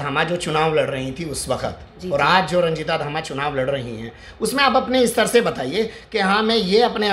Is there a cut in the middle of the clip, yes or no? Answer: no